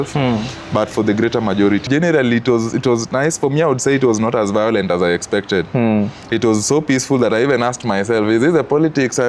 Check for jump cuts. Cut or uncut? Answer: cut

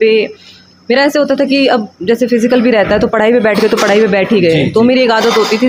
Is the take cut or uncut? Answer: uncut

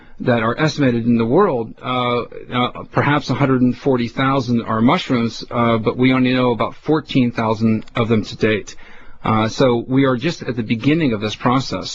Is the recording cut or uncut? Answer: cut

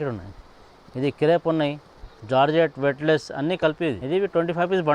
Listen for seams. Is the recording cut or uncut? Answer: cut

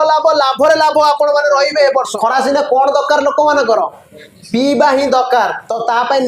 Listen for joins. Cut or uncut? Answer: cut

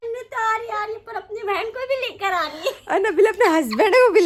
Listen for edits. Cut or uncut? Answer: uncut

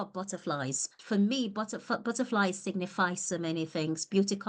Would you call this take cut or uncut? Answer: cut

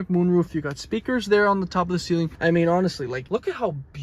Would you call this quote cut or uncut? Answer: cut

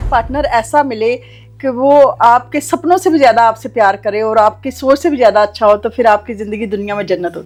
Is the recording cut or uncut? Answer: uncut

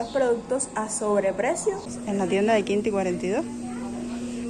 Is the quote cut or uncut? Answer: cut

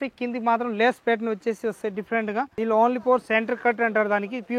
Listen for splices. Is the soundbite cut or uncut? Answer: cut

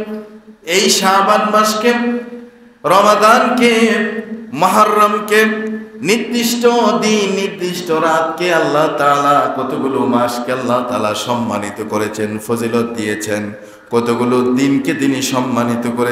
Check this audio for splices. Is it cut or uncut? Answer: uncut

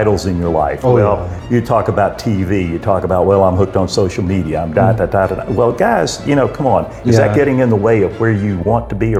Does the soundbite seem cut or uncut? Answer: uncut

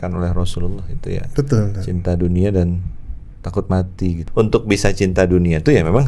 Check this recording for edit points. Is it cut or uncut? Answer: cut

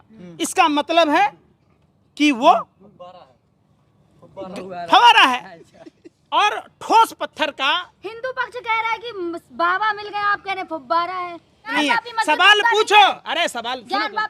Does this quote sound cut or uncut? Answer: cut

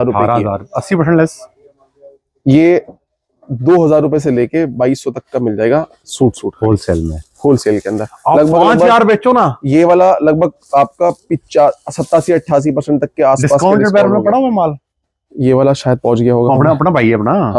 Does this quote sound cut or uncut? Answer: uncut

